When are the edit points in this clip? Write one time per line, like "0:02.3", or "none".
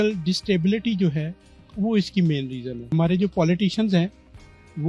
0:02.9